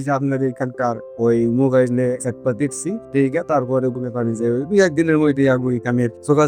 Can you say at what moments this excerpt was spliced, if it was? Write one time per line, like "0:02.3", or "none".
none